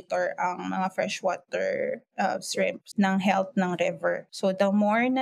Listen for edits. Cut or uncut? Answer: cut